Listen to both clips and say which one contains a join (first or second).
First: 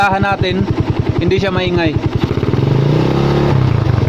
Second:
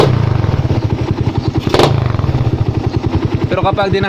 second